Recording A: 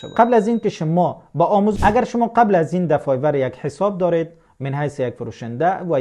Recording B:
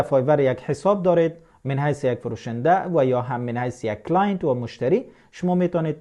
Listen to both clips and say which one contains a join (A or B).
A